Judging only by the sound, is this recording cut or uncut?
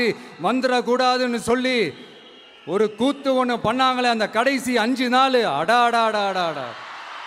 uncut